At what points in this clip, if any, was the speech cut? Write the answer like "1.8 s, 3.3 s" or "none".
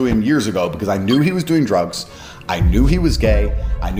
none